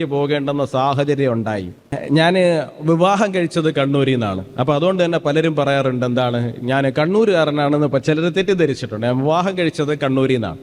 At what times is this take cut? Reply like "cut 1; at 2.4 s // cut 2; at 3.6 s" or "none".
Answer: cut 1; at 1.9 s

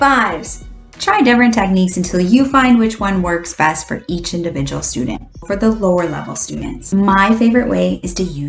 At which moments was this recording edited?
cut 1; at 5.4 s // cut 2; at 6.8 s

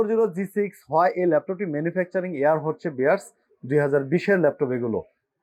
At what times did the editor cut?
none

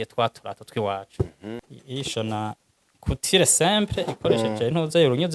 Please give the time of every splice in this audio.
cut 1; at 1.7 s

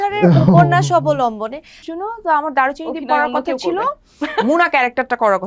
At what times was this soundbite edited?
cut 1; at 1.8 s

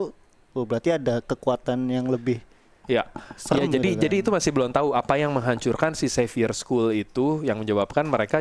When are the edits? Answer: none

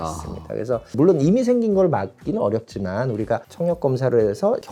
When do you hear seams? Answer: none

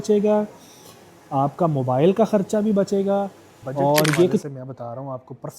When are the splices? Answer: cut 1; at 4.4 s

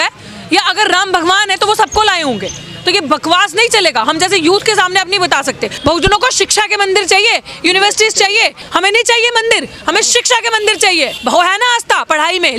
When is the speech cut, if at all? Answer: cut 1; at 5.7 s // cut 2; at 8.6 s // cut 3; at 11.2 s

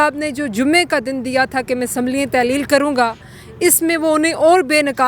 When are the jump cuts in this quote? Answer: none

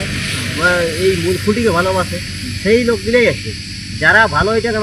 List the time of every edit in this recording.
none

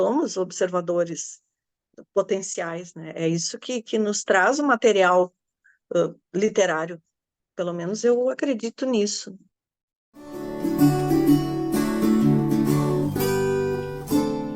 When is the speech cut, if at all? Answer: cut 1; at 10.4 s

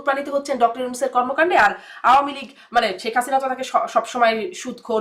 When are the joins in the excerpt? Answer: none

